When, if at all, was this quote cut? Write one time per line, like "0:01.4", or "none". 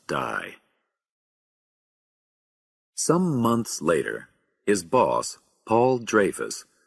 0:04.0